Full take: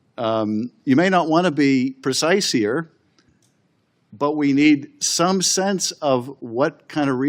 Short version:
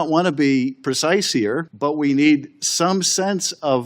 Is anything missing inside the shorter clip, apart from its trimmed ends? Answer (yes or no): yes